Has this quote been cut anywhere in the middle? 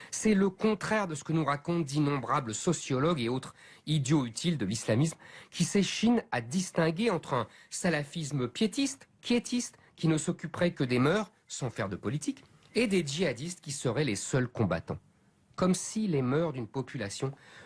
yes; 1 cut; at 7.2 s

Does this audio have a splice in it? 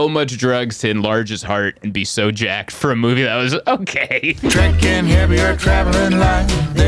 yes; 1 cut; at 4.4 s

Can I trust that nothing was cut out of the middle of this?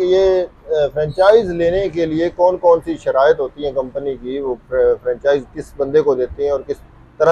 yes; 0 cuts

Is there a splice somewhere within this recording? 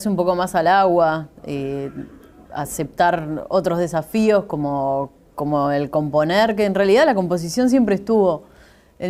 no; 0 cuts

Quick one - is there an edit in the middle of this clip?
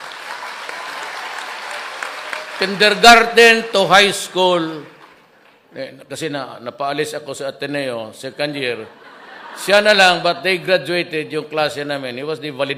no; 0 cuts

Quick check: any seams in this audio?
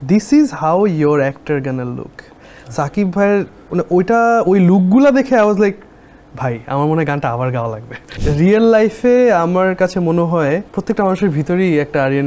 yes; 2 cuts; at 8.2 s, 10.7 s

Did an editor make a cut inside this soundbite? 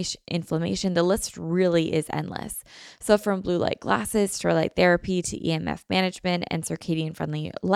no; 0 cuts

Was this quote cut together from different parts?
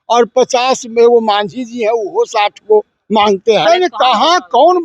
yes; 1 cut; at 3.6 s

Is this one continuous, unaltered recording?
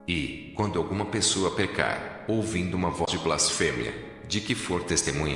no; 1 cut; at 3.1 s

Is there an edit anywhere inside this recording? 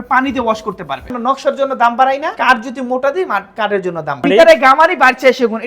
yes; 3 cuts; at 1.1 s, 2.3 s, 4.2 s

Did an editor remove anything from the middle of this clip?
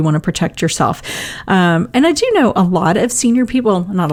no; 0 cuts

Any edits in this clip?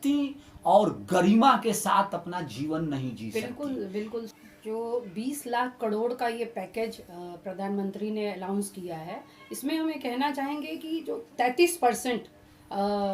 yes; 2 cuts; at 4.3 s, 11.3 s

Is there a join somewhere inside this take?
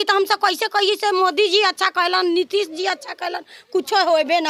no; 0 cuts

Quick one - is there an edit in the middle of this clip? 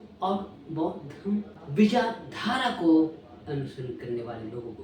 no; 0 cuts

